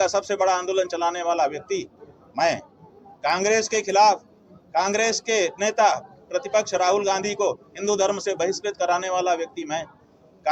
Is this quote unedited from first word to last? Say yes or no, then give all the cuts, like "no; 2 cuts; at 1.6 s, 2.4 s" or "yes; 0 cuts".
yes; 0 cuts